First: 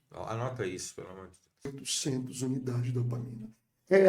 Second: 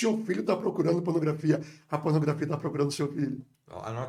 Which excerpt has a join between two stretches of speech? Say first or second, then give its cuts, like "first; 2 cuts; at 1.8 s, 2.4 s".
first; 1 cut; at 1.7 s